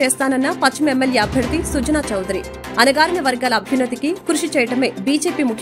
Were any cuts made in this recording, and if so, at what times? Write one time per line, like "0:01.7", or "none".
none